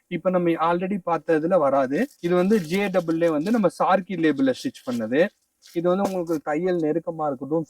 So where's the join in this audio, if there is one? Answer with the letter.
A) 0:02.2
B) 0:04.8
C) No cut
A